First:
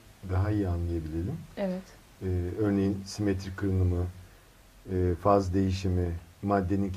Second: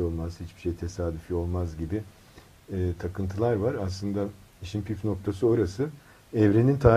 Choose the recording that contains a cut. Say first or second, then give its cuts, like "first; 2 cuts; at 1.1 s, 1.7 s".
second; 1 cut; at 1.9 s